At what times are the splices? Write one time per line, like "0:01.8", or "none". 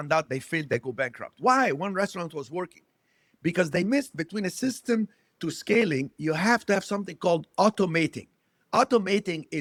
none